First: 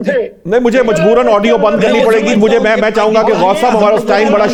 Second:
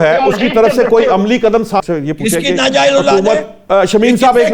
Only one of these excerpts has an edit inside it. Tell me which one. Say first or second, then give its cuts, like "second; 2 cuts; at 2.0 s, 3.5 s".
second; 1 cut; at 1.8 s